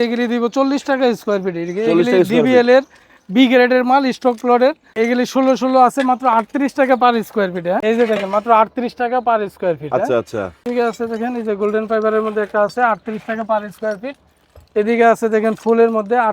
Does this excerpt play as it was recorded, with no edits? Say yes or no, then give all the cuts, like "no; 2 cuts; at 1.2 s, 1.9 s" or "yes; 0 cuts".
no; 3 cuts; at 4.9 s, 7.8 s, 10.7 s